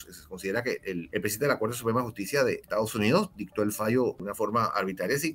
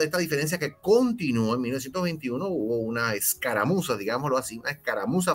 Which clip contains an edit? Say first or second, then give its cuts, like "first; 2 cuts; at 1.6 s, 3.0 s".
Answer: first; 3 cuts; at 1.1 s, 2.6 s, 4.2 s